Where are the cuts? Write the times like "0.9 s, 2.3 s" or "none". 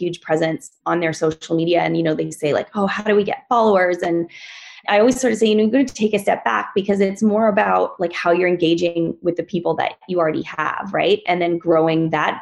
4.8 s, 11.2 s